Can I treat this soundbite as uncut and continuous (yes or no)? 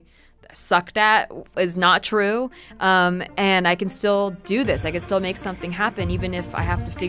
yes